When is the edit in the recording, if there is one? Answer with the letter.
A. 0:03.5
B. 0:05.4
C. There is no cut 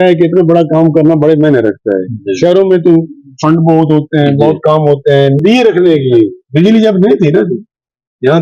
B